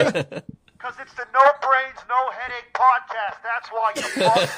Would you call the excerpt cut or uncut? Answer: uncut